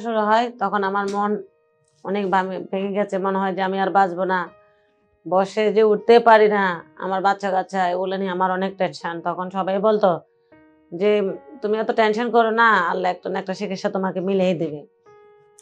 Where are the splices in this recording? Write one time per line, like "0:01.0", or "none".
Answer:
none